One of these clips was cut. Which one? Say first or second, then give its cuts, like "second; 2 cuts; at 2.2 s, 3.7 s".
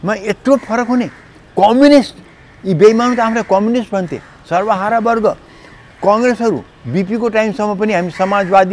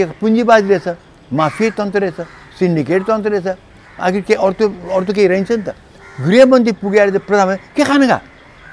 second; 1 cut; at 6.0 s